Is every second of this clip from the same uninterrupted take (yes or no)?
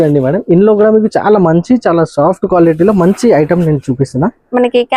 yes